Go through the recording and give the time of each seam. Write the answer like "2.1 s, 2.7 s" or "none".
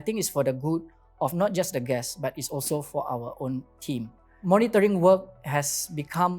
4.4 s

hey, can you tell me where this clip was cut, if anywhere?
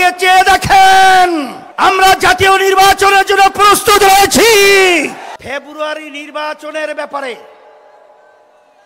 1.6 s, 5.3 s

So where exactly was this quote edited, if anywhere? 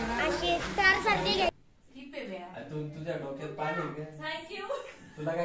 1.5 s

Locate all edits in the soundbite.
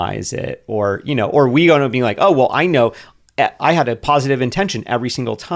3.6 s

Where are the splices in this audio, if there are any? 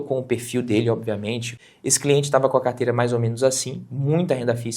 1.5 s

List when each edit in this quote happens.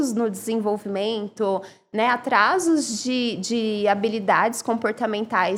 none

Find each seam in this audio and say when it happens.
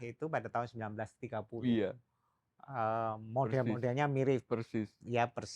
none

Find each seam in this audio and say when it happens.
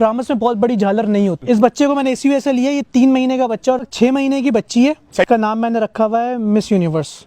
1.4 s, 3.8 s, 5.3 s

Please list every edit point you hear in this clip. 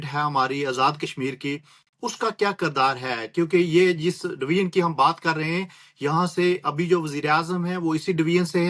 none

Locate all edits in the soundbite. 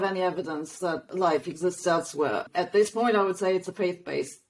1.1 s, 2.5 s

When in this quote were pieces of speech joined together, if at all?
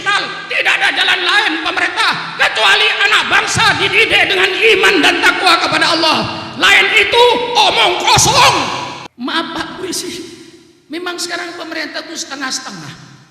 9.0 s

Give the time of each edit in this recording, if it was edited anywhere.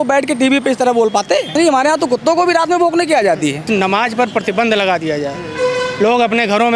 1.5 s, 3.6 s

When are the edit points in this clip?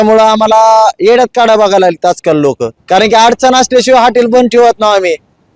2.7 s

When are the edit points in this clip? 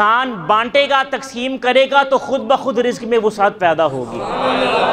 none

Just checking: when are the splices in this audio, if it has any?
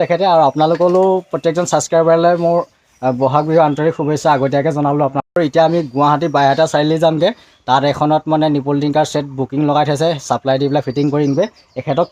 5.4 s

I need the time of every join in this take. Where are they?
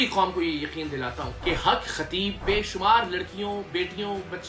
1.3 s, 2.4 s

